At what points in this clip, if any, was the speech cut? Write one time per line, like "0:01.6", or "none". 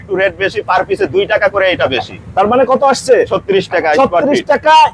none